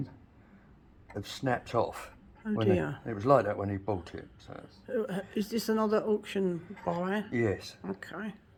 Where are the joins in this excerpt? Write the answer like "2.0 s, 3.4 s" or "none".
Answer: none